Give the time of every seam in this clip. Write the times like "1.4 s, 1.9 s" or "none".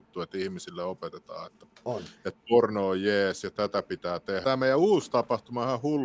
4.4 s